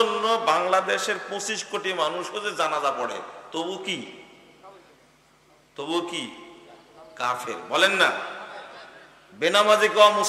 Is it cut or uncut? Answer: uncut